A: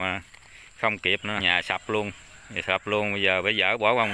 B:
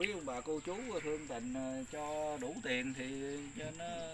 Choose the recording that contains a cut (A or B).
A